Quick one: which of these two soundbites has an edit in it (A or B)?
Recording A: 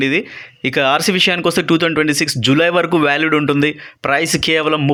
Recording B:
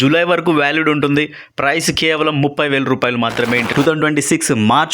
B